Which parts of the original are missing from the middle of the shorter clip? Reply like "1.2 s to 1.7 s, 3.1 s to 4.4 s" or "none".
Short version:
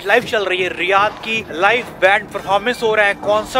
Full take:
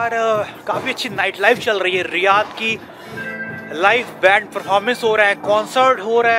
2.7 s to 3.6 s